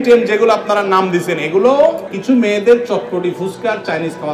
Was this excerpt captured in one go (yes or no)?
no